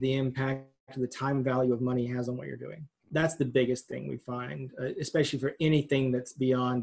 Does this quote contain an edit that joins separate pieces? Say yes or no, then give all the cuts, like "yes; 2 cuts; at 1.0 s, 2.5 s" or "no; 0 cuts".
yes; 1 cut; at 3.1 s